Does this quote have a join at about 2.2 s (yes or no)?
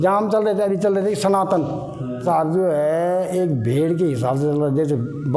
yes